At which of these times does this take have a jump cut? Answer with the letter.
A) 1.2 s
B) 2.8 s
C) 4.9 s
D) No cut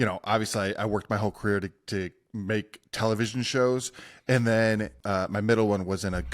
C